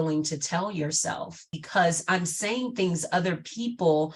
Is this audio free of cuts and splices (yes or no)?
no